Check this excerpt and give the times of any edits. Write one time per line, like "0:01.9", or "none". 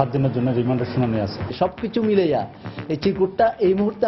0:01.4